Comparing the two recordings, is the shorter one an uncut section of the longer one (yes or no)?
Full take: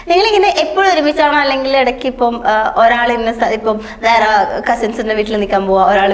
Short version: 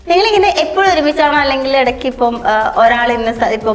yes